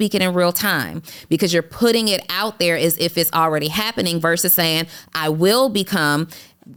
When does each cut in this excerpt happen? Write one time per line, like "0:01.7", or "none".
none